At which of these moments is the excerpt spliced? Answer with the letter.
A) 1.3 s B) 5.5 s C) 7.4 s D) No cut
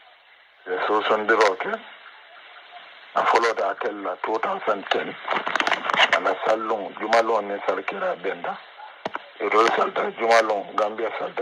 B